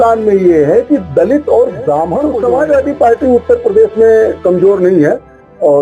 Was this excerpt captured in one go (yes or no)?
no